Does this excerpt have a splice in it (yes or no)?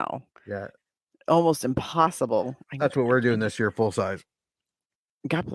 no